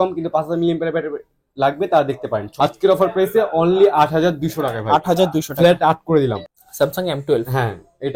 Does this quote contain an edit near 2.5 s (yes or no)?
yes